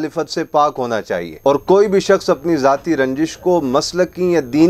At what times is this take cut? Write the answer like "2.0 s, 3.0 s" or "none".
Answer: 1.3 s